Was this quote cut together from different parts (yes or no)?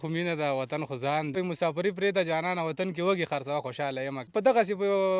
yes